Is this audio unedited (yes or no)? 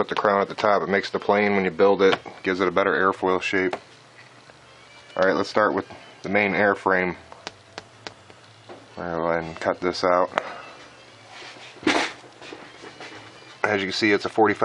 no